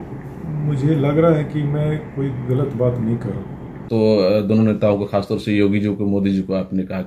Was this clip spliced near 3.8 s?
yes; 1 cut; at 3.8 s

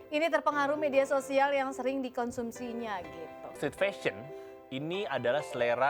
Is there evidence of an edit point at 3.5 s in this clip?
yes; 1 cut; at 3.5 s

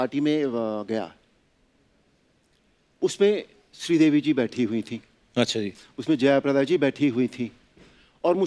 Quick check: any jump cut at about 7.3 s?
no; 0 cuts

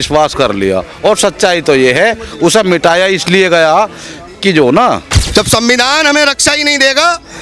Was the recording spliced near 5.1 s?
yes; 1 cut; at 5.1 s

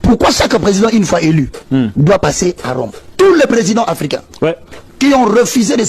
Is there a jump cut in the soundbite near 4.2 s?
no; 1 cut; at 3.0 s

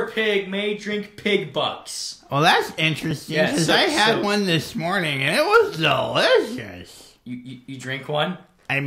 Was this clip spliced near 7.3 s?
no; 0 cuts

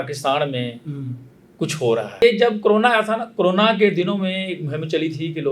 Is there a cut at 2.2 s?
yes; 1 cut; at 2.2 s

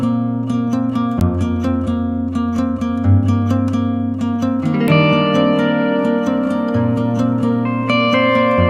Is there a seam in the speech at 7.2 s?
no; 1 cut; at 1.2 s

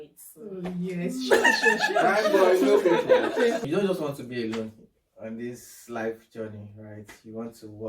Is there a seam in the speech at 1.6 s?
no; 1 cut; at 3.6 s

